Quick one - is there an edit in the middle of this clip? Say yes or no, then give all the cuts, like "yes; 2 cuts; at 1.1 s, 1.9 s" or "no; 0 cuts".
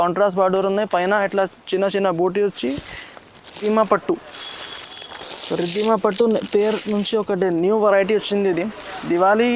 yes; 1 cut; at 3.6 s